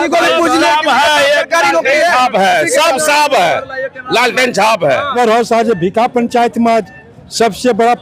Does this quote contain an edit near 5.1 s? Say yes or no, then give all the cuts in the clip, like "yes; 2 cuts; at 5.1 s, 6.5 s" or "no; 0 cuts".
yes; 1 cut; at 5.1 s